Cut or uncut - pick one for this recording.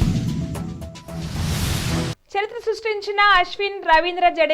cut